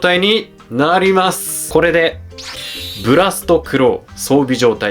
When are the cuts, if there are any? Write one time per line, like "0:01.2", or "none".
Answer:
0:01.5